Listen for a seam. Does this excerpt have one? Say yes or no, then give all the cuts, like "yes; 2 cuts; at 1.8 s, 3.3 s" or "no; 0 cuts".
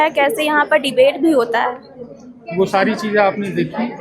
no; 0 cuts